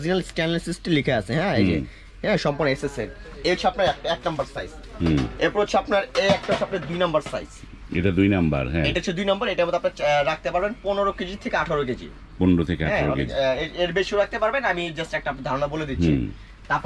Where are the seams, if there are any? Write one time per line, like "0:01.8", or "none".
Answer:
none